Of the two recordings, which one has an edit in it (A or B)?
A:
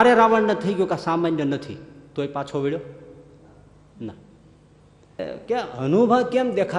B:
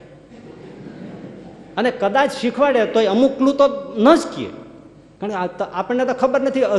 A